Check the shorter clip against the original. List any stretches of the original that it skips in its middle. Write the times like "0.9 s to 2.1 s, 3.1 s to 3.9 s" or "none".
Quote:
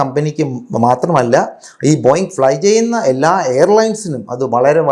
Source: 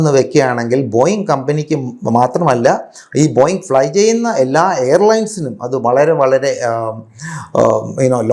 none